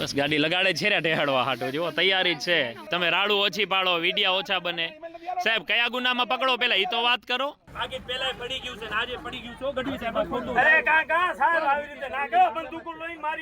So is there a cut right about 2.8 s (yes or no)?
yes